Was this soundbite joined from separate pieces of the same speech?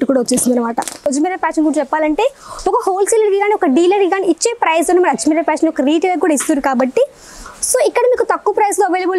yes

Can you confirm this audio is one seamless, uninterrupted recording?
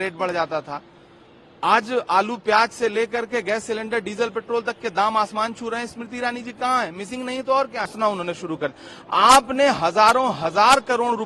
no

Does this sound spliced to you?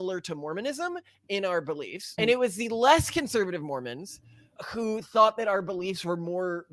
yes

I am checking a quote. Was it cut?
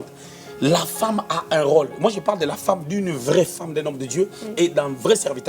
no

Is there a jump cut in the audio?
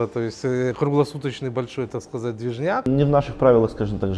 yes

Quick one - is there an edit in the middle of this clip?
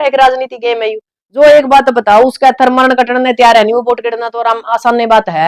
no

